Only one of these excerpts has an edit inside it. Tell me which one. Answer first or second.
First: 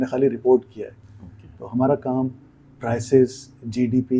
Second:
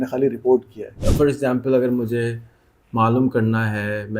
second